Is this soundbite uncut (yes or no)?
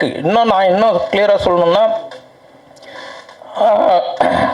yes